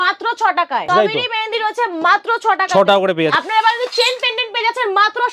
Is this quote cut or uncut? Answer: cut